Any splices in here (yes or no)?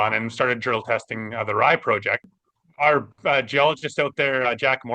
yes